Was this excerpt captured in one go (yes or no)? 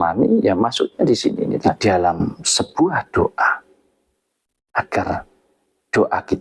no